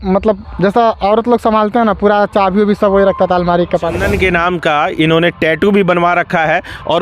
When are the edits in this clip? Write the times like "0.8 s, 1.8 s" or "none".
4.0 s